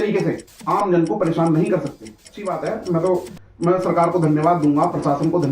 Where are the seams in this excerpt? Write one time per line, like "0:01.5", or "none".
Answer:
0:02.3